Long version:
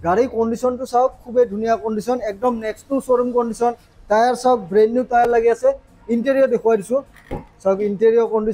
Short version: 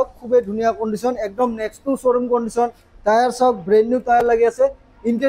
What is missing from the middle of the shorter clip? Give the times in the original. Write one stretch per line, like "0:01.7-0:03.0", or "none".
none